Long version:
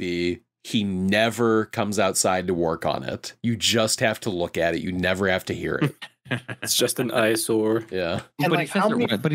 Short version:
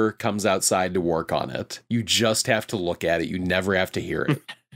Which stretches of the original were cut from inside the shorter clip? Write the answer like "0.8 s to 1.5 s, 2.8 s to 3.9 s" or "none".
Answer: none